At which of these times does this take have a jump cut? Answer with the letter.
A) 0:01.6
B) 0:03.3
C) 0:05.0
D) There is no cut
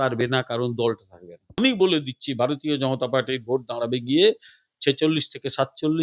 A